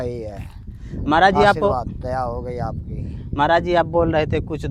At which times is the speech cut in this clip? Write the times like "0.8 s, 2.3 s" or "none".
none

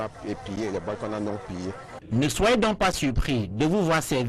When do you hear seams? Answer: 3.0 s

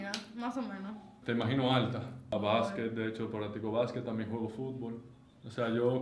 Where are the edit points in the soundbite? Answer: 2.3 s

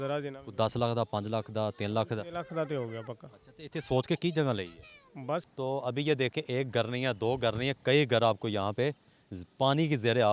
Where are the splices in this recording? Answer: 5.5 s

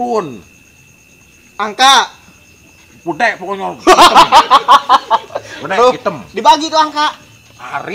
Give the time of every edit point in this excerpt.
none

